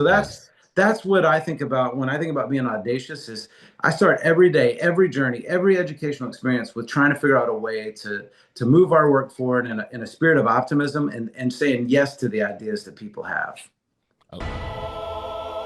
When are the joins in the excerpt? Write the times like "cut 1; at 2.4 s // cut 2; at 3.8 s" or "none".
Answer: cut 1; at 14.3 s